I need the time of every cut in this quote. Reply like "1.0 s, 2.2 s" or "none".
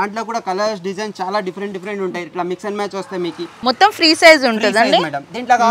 3.5 s